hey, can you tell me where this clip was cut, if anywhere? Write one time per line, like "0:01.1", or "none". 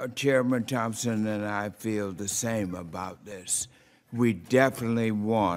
0:02.5